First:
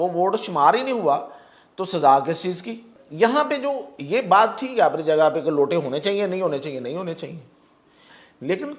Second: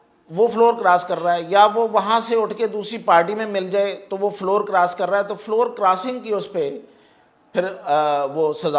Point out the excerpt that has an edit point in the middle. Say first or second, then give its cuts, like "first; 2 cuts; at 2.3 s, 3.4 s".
first; 1 cut; at 3.0 s